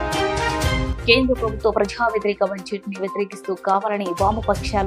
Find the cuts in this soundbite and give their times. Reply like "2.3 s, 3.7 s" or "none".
none